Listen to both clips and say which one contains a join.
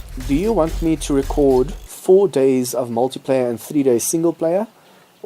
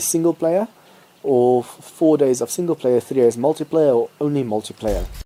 first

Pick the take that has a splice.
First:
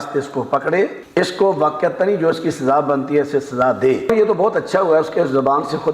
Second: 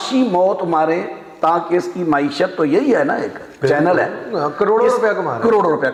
first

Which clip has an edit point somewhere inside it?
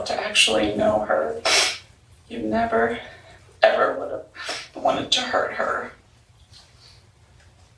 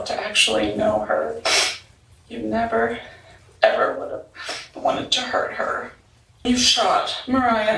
second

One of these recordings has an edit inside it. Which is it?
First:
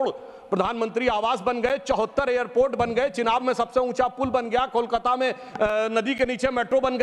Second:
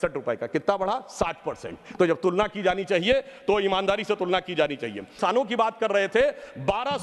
second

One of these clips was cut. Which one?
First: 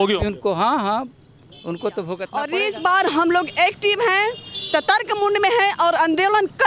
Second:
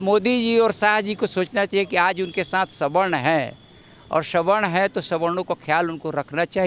first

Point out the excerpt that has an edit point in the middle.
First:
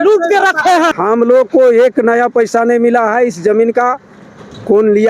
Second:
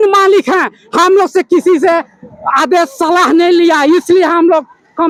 first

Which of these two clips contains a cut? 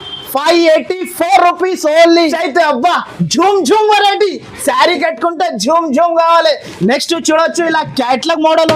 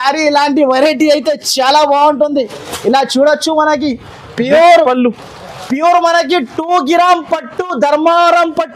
first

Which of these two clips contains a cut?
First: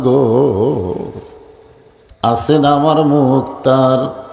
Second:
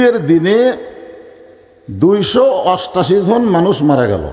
first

